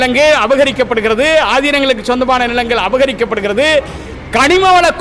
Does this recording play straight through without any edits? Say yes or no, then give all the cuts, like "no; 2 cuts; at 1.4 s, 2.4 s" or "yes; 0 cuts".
yes; 0 cuts